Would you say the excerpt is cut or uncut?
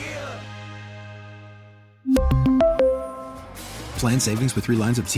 uncut